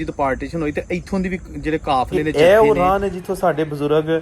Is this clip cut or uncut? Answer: cut